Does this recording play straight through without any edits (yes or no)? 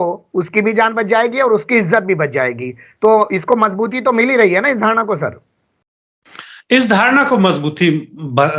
yes